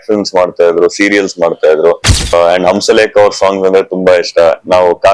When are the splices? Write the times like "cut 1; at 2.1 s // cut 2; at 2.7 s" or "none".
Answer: cut 1; at 2.3 s